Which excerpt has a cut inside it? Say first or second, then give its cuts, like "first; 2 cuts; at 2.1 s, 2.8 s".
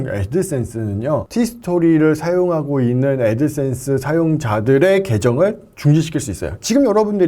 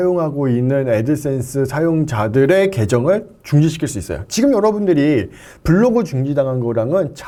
first; 1 cut; at 1.3 s